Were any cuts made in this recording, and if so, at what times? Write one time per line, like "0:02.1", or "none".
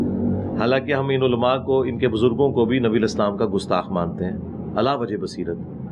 none